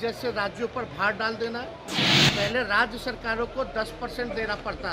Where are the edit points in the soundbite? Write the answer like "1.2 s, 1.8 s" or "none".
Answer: 2.1 s